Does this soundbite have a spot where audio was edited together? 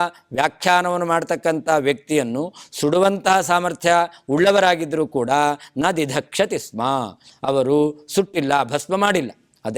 no; 0 cuts

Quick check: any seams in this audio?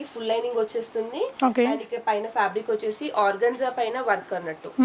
no; 0 cuts

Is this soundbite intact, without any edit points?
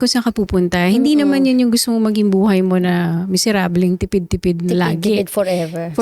yes; 0 cuts

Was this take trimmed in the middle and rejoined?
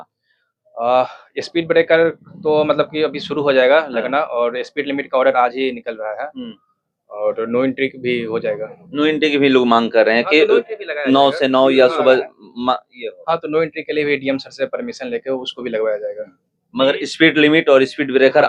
no; 0 cuts

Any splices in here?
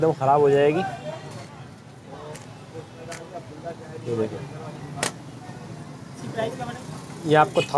yes; 1 cut; at 1.5 s

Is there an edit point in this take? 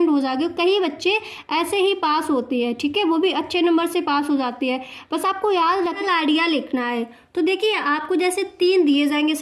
yes; 1 cut; at 6.0 s

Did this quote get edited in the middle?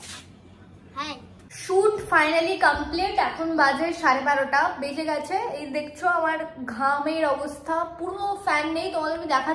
yes; 1 cut; at 1.3 s

